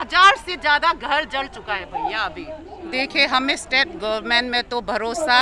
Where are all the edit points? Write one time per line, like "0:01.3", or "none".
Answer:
0:02.7